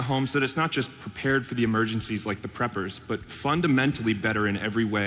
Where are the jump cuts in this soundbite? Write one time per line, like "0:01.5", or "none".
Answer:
none